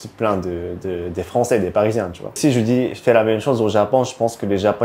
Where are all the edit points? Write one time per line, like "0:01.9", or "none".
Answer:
0:02.4